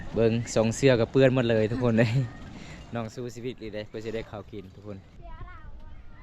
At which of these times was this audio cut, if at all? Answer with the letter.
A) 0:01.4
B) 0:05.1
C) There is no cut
B